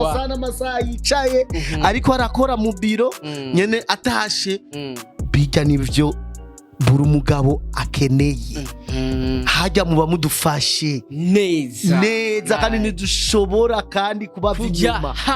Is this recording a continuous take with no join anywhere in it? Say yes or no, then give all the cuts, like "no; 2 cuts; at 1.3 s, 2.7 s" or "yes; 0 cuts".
yes; 0 cuts